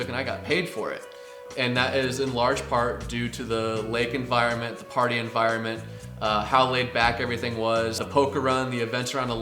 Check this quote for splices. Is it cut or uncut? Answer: cut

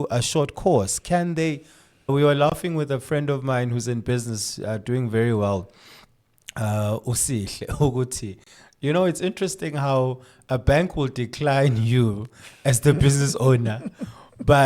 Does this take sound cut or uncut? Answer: cut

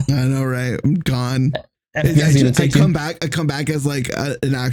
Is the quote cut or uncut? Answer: uncut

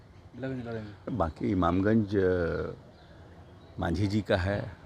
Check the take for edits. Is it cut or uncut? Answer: cut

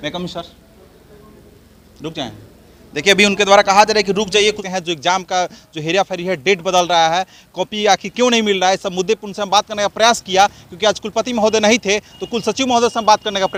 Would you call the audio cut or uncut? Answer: uncut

